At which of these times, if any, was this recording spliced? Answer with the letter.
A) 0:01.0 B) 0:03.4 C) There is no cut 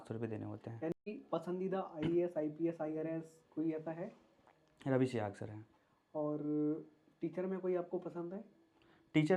A